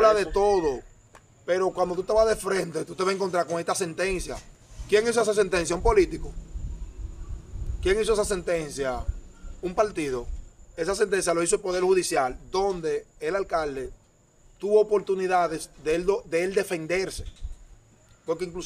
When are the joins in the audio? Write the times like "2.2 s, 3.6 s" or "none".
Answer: none